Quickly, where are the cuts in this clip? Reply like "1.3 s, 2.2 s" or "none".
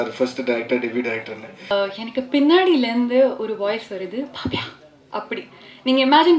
1.7 s